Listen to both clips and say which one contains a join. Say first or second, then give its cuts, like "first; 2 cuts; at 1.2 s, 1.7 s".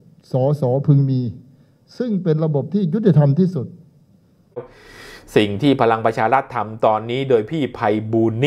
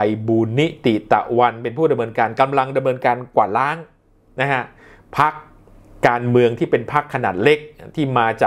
first; 1 cut; at 4.6 s